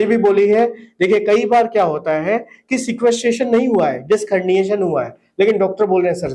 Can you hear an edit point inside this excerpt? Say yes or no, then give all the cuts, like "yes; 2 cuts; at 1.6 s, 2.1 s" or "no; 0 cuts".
no; 0 cuts